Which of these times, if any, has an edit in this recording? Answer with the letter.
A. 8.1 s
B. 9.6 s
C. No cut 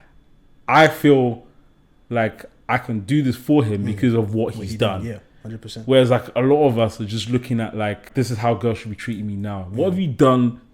A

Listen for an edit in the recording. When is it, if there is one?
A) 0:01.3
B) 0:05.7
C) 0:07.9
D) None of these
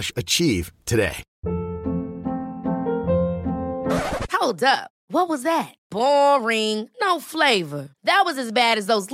A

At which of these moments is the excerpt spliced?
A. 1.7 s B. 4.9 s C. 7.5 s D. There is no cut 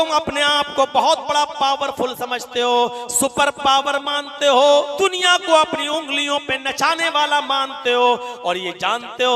B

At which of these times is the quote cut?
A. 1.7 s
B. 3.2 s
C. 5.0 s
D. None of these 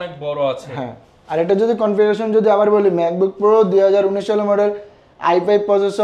D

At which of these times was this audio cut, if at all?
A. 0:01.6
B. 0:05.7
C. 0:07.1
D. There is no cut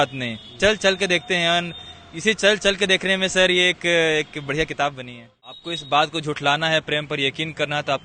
B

